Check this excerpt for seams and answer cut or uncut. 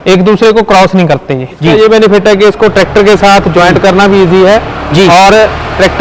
cut